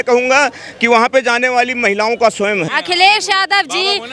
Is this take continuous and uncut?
no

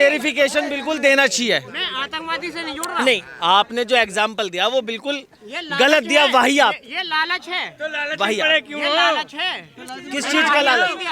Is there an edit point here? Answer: no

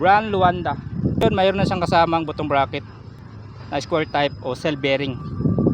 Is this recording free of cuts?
no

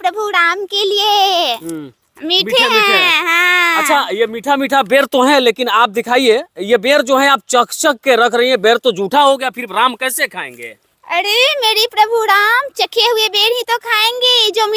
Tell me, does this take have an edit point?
no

